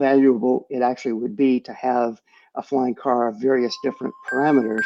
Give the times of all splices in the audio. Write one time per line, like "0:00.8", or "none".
none